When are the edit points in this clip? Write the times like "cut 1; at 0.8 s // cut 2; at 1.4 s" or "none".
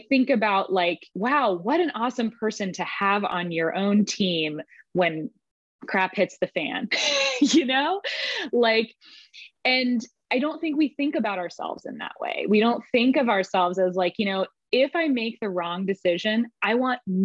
cut 1; at 1.1 s